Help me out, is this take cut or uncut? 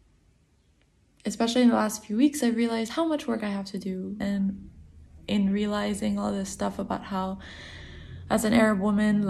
cut